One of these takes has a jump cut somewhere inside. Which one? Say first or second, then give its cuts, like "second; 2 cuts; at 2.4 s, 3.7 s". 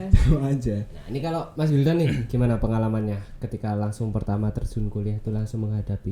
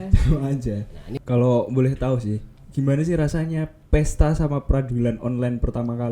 second; 1 cut; at 1.0 s